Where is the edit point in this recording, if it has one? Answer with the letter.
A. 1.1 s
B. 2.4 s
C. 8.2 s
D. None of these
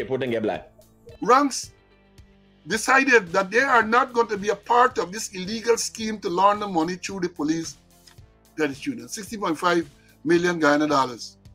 A